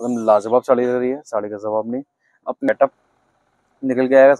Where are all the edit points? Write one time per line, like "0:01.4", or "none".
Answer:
0:02.7